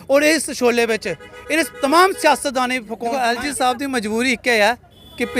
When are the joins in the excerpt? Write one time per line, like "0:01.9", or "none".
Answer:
0:03.0